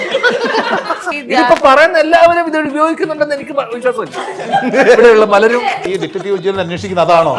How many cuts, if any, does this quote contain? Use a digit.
2